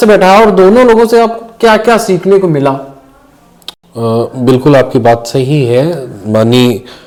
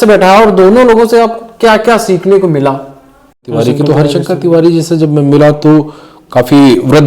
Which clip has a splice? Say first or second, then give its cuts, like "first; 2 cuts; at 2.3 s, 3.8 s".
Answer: second; 1 cut; at 3.5 s